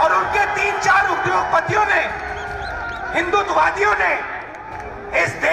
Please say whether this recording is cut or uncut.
uncut